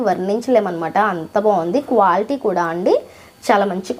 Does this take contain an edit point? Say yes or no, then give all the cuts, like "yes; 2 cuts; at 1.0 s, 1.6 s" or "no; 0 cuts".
no; 0 cuts